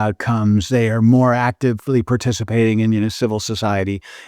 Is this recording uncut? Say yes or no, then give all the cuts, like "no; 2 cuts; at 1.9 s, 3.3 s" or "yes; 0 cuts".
no; 1 cut; at 3.1 s